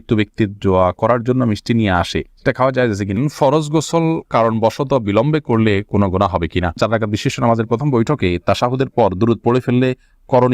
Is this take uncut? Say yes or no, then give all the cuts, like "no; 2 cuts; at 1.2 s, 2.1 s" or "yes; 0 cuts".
no; 2 cuts; at 3.2 s, 6.8 s